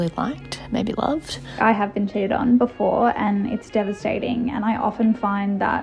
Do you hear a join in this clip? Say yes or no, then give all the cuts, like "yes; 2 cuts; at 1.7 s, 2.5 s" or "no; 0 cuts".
yes; 1 cut; at 1.4 s